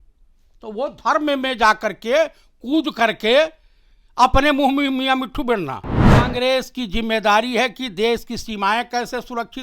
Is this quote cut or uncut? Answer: cut